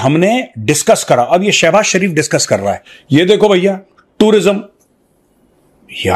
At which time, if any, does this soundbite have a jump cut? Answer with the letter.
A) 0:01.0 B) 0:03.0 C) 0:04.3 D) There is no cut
B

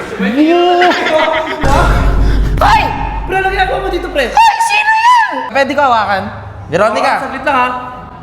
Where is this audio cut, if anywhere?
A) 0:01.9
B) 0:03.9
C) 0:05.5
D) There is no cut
C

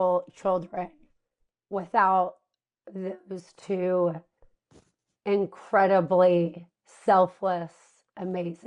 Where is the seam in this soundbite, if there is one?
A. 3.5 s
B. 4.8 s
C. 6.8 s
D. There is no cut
D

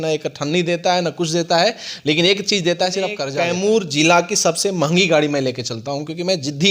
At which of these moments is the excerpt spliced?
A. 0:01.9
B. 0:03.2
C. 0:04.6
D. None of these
B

